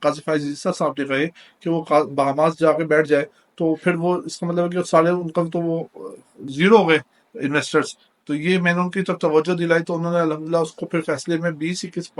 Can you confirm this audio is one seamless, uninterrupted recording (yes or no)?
yes